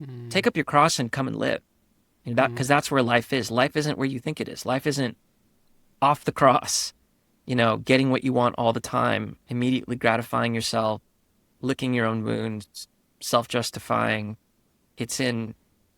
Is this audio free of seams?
no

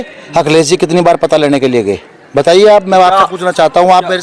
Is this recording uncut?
yes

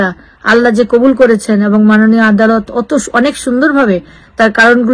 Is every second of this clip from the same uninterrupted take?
yes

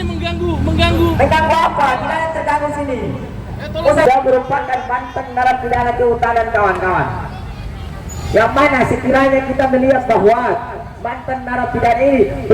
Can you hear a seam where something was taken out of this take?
yes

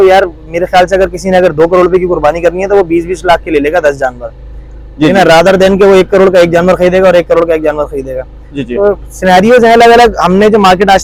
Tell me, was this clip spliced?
no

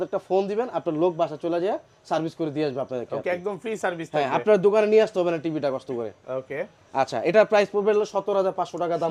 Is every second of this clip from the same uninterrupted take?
yes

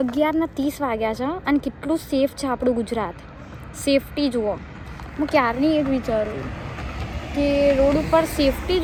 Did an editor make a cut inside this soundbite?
no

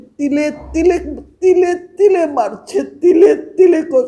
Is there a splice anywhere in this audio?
no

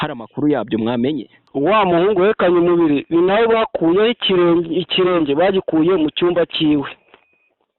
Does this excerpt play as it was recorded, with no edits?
no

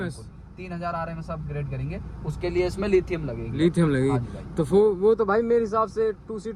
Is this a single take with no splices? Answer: yes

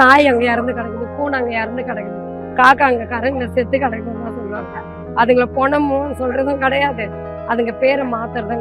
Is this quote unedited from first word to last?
yes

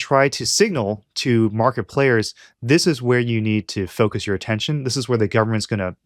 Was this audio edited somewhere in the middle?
no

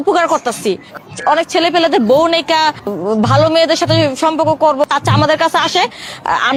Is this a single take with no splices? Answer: yes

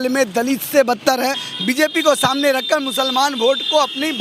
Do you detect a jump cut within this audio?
yes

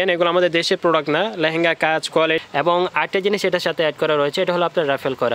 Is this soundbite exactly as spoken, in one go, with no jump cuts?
no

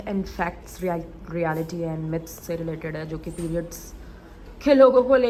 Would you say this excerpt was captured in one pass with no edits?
yes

